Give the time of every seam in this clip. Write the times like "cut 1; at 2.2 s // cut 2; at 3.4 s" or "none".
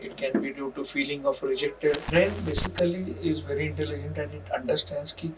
cut 1; at 2.0 s